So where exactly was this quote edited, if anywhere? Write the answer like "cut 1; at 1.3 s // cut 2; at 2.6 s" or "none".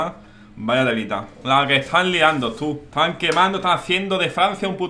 none